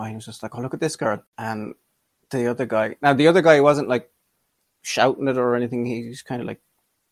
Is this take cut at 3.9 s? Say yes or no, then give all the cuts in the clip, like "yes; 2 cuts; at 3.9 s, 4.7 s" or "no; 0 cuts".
no; 1 cut; at 1.3 s